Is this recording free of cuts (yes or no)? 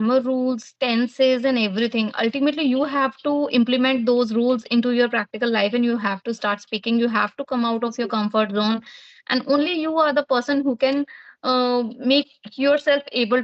yes